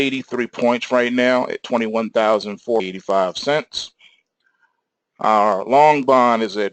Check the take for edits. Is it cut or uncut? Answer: uncut